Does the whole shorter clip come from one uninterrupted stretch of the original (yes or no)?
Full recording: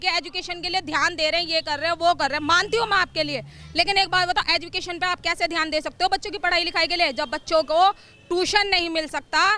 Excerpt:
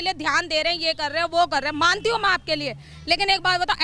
yes